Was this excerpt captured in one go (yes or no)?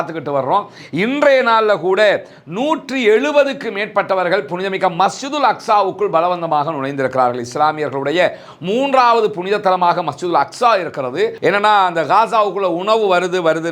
no